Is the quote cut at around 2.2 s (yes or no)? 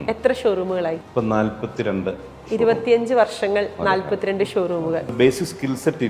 no